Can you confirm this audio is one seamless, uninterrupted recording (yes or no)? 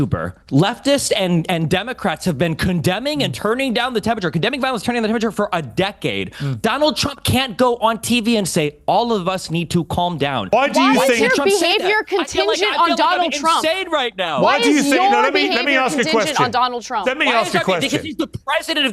no